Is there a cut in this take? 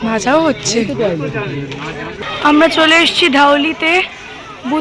yes; 1 cut; at 2.2 s

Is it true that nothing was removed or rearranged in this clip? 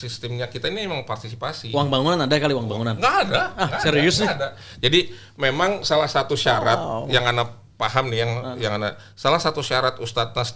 yes; 0 cuts

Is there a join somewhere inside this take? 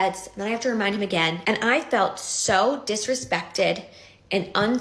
yes; 1 cut; at 1.4 s

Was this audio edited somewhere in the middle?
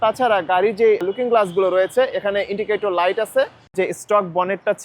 yes; 1 cut; at 3.7 s

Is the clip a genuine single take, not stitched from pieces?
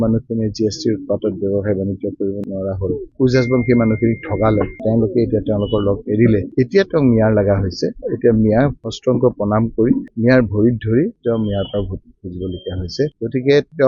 yes; 0 cuts

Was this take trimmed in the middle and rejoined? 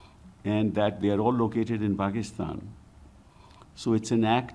no; 0 cuts

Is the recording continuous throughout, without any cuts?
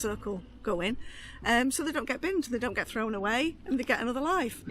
yes; 0 cuts

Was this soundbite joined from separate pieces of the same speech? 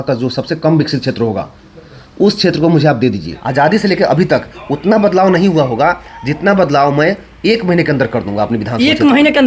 yes; 1 cut; at 3.3 s

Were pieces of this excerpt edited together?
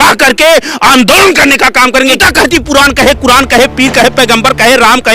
yes; 1 cut; at 2.2 s

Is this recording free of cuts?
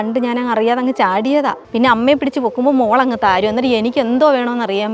no; 1 cut; at 1.6 s

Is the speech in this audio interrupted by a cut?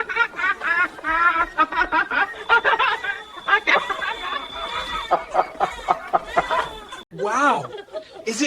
yes; 1 cut; at 7.1 s

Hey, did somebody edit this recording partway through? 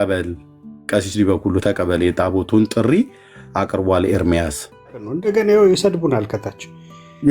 yes; 1 cut; at 5.1 s

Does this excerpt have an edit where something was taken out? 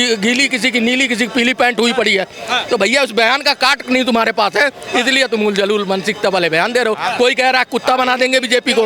no; 0 cuts

